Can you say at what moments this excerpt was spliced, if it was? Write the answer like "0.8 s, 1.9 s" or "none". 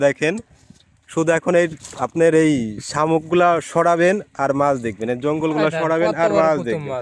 none